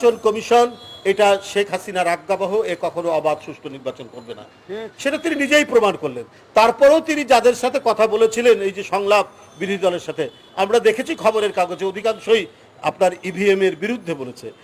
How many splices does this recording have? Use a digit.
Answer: 0